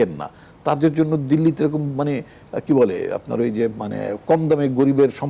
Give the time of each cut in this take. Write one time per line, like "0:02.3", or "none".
none

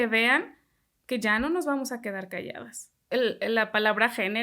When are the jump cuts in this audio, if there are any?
0:03.0

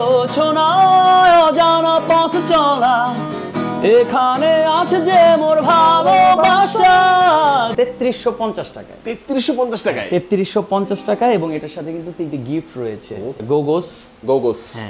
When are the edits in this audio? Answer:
0:07.7
0:13.4

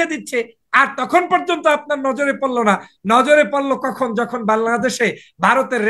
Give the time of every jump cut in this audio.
none

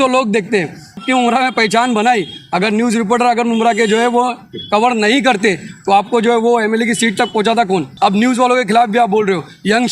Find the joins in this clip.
0:01.0
0:07.9

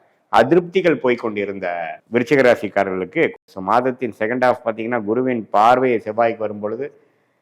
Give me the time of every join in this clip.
0:01.9
0:03.4

